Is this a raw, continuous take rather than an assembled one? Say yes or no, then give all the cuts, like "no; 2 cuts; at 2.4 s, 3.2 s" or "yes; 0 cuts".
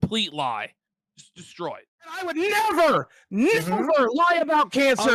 no; 1 cut; at 2.3 s